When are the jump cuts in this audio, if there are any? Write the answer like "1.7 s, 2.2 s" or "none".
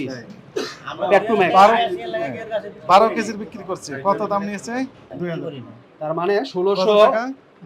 5.1 s